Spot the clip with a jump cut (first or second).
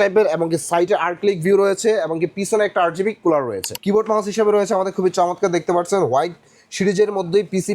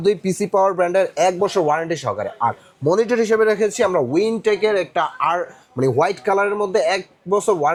first